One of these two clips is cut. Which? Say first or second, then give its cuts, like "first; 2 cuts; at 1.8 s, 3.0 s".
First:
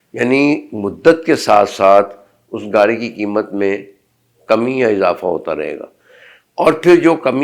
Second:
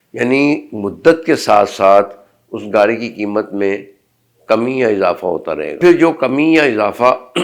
second; 1 cut; at 5.8 s